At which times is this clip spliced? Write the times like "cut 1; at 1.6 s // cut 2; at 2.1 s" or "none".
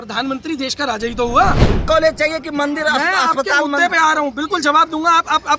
cut 1; at 1.8 s